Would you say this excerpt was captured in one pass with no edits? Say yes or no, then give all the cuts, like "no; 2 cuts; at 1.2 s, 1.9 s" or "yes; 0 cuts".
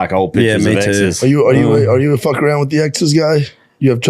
no; 1 cut; at 1.2 s